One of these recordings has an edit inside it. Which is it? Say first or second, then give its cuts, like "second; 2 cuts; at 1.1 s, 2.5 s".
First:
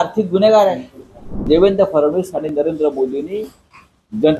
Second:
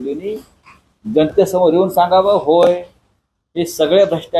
first; 1 cut; at 1.4 s